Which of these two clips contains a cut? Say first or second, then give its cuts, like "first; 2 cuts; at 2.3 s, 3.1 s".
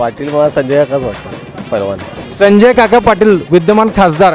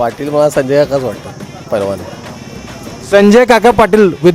first; 1 cut; at 2.2 s